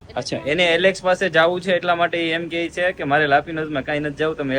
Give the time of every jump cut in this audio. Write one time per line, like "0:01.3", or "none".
none